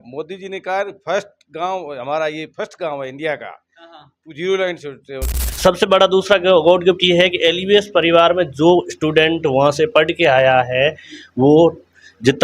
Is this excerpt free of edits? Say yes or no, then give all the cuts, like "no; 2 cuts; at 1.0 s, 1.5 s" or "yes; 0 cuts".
no; 1 cut; at 5.4 s